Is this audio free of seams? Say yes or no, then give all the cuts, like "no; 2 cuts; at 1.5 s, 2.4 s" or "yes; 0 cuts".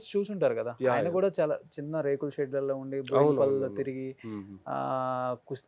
yes; 0 cuts